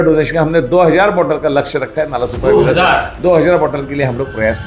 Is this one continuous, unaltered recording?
yes; 0 cuts

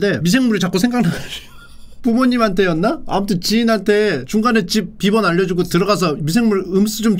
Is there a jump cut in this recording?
no; 0 cuts

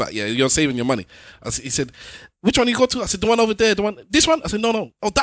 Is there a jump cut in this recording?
no; 0 cuts

